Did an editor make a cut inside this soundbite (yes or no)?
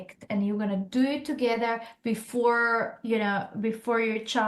no